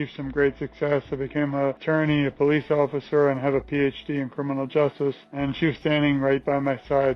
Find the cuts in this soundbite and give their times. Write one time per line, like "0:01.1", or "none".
0:01.8
0:05.3